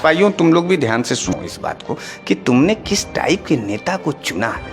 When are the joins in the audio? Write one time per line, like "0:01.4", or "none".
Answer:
0:01.3